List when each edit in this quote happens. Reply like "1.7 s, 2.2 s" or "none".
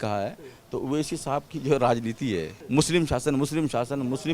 2.6 s